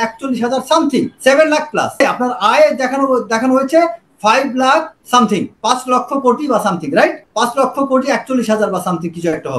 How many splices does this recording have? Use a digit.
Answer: 4